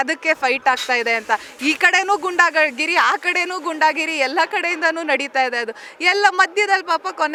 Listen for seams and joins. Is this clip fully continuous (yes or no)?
yes